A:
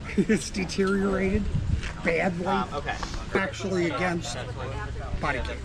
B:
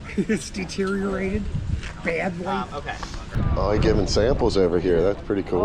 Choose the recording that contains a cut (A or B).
B